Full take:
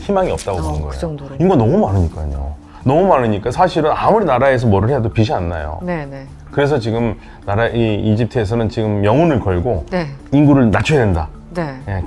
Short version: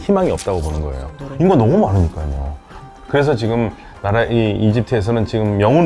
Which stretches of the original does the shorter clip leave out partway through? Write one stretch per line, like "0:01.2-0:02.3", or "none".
0:02.7-0:06.1